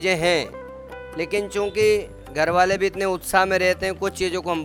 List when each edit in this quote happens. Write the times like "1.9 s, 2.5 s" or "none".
none